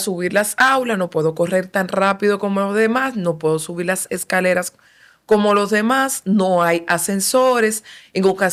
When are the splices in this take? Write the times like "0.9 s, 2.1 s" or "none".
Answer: none